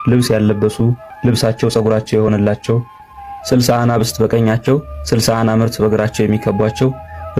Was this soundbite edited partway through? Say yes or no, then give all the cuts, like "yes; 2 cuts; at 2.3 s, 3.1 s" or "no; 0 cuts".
yes; 1 cut; at 1.1 s